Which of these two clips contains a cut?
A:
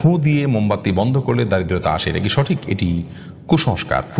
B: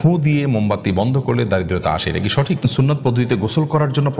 B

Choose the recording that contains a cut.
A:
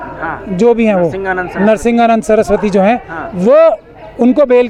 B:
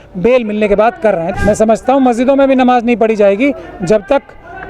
B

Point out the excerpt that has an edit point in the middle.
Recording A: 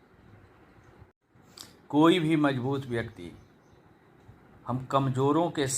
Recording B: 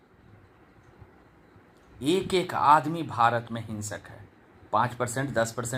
A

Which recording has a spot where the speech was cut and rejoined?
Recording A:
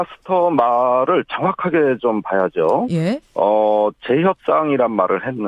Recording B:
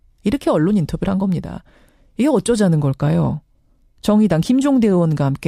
B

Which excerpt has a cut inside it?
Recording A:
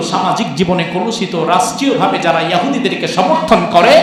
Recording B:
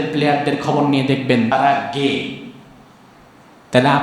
B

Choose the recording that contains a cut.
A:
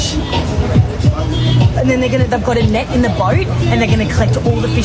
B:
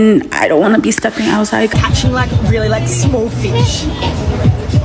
B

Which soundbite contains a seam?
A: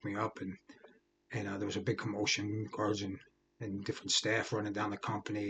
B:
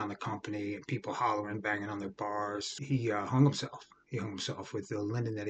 B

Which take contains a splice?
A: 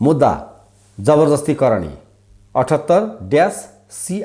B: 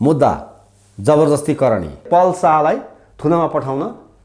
B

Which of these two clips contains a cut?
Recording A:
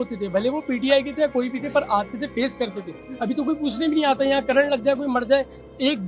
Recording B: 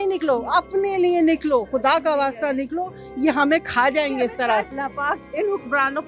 B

